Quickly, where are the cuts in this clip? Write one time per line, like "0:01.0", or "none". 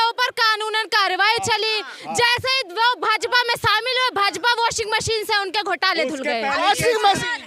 none